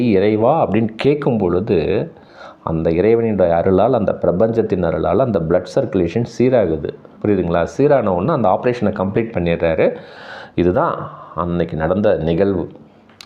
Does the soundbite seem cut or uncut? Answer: uncut